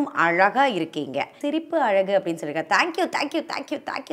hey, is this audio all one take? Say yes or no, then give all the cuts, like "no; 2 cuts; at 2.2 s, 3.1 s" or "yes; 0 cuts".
no; 1 cut; at 1.4 s